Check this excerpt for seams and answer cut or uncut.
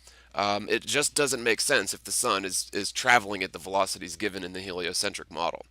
cut